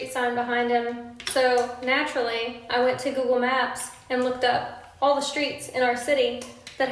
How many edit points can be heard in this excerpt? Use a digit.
0